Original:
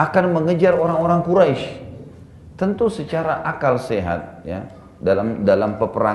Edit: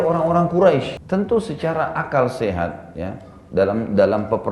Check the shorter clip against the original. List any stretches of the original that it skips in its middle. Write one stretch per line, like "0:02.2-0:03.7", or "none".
0:01.7-0:02.5